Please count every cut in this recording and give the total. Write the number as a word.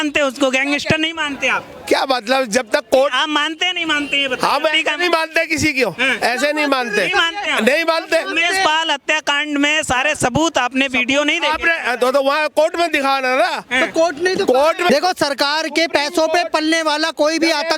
zero